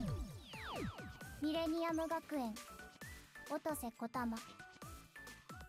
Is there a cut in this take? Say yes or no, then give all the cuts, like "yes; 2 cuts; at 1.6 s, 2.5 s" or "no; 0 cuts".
yes; 1 cut; at 0.9 s